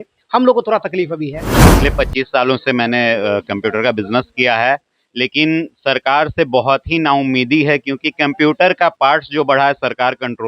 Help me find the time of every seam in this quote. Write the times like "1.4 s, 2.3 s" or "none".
1.7 s